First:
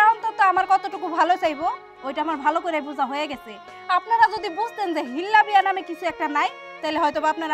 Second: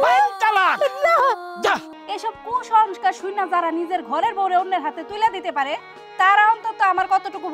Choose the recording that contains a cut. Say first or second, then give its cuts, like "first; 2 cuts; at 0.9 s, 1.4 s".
second; 1 cut; at 1.9 s